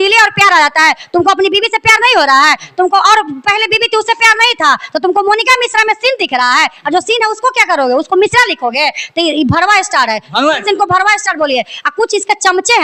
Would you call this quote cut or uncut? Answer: uncut